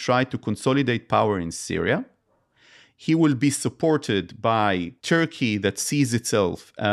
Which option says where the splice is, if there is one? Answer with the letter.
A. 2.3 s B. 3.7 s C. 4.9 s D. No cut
C